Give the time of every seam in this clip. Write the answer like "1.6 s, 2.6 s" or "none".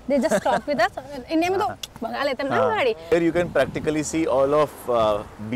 3.1 s